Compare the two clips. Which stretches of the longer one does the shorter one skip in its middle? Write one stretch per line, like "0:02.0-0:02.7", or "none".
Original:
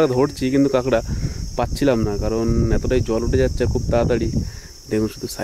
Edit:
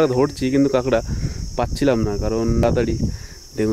0:02.6-0:04.0